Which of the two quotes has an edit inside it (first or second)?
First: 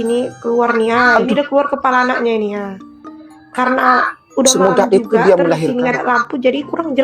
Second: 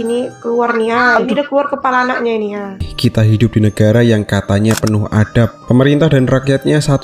second